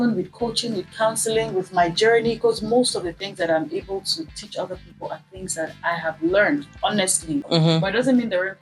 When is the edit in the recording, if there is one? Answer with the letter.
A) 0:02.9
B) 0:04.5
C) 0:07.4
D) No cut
C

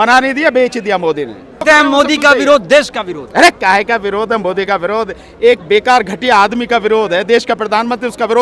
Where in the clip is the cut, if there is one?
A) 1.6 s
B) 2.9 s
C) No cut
A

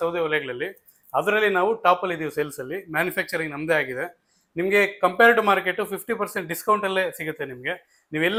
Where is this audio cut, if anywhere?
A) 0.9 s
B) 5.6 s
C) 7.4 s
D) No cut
D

